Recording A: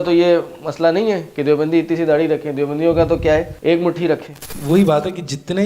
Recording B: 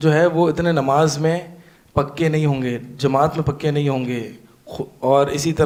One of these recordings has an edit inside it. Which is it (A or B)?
A